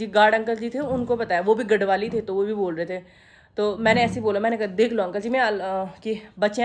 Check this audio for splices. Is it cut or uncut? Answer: uncut